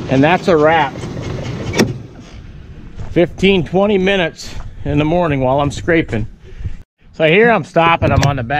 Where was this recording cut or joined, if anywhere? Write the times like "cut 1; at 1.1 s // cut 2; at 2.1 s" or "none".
cut 1; at 6.9 s